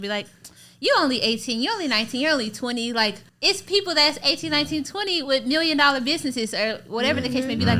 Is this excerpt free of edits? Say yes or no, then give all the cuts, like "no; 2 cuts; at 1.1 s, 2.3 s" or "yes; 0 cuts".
no; 1 cut; at 3.3 s